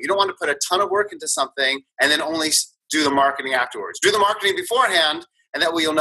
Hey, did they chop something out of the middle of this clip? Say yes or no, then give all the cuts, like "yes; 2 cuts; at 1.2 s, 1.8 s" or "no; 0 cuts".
yes; 1 cut; at 1.8 s